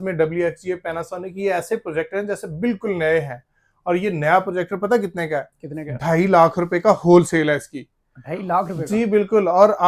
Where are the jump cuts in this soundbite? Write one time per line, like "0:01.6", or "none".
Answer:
none